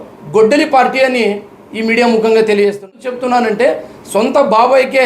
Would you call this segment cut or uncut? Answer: cut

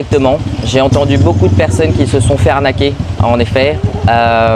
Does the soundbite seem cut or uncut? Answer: uncut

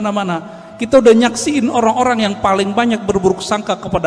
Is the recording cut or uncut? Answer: uncut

